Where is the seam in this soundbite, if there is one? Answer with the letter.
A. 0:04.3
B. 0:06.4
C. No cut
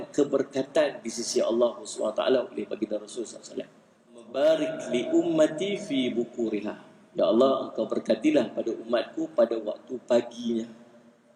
A